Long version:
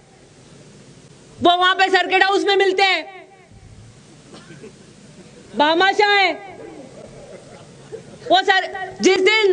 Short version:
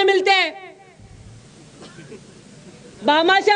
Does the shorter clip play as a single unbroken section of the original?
yes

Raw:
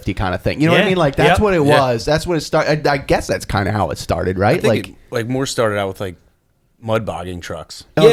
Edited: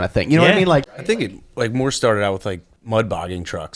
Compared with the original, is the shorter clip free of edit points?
no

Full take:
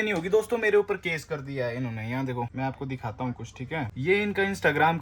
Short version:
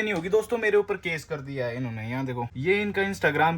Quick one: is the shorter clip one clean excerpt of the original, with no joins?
no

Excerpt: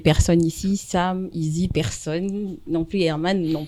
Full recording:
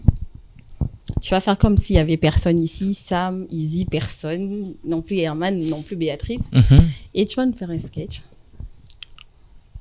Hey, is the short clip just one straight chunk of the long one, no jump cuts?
yes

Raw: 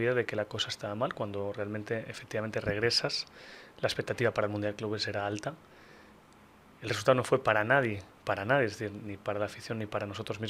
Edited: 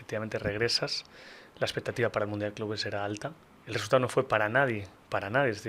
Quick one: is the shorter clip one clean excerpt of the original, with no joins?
no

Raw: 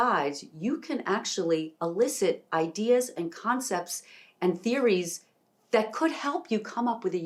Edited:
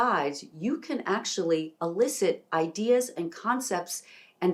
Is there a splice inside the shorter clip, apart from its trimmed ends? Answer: no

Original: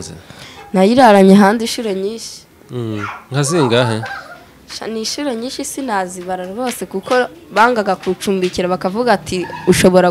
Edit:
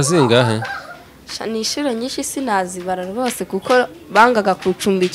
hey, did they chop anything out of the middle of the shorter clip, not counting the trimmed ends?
no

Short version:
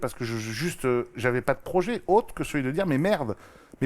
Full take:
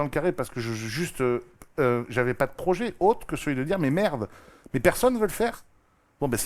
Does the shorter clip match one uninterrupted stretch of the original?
no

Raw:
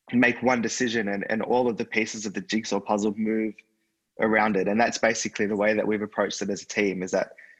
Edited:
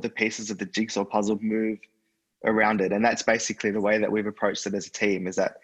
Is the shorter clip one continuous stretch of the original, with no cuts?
yes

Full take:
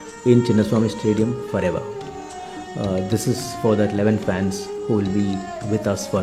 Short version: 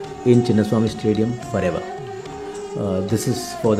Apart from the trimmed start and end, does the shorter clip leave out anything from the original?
no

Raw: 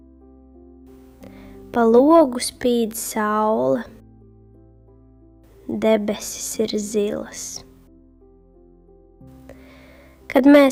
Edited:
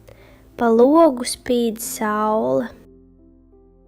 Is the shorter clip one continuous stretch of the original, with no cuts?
no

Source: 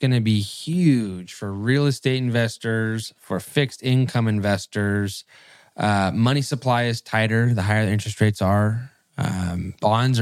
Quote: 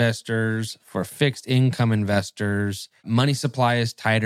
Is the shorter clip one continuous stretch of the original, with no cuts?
no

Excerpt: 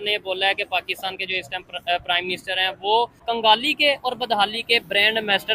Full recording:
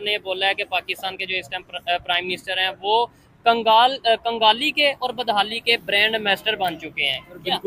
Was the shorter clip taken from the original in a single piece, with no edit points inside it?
no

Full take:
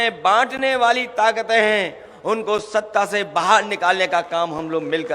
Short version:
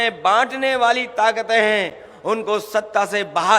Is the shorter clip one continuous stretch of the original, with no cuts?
yes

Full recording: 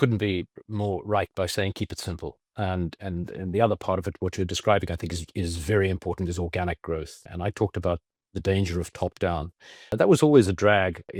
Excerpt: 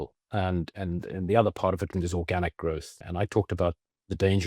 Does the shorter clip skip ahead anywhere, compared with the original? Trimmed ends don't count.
yes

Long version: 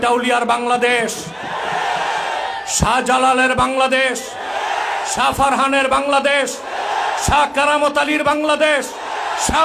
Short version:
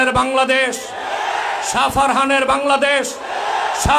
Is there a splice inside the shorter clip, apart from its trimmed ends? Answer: no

